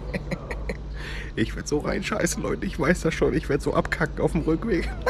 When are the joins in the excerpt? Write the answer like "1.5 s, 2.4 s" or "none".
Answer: none